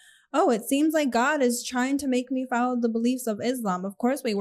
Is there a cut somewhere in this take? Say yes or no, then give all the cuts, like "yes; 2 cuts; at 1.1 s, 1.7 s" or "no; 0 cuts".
no; 0 cuts